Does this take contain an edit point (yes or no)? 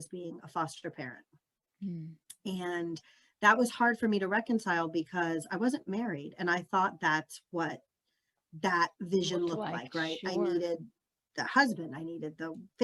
no